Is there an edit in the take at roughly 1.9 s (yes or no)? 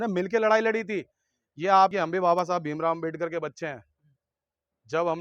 yes